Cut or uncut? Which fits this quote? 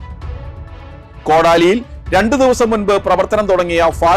cut